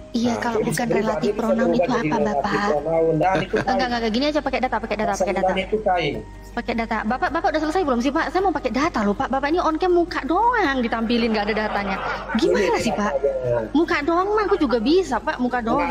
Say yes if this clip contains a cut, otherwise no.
no